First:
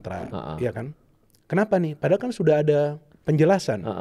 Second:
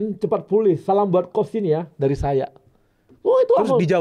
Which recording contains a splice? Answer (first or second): first